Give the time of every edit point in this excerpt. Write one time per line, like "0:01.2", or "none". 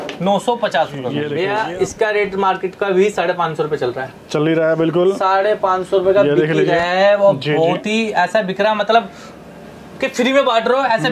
0:01.3